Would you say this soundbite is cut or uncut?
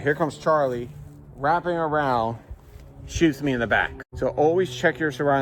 uncut